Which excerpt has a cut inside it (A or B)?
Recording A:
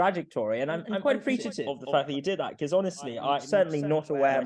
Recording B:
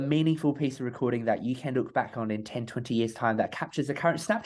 A